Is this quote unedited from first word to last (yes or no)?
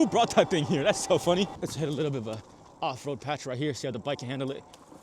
no